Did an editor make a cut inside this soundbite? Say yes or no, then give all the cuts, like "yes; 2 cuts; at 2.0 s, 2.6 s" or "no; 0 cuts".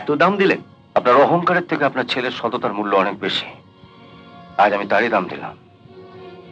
no; 0 cuts